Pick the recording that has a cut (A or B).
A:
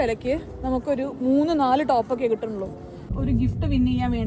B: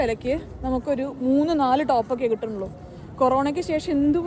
A